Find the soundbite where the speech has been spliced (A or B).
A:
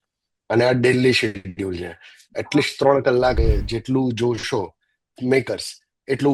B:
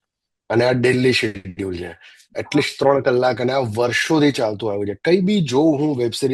A